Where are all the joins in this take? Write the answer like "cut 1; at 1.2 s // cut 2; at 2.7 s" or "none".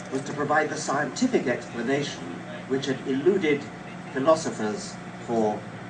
cut 1; at 4.5 s